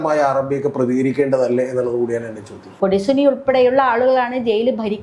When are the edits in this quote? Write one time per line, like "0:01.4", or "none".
0:02.7